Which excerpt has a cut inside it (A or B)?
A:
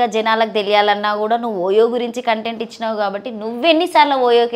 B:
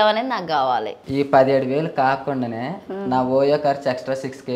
B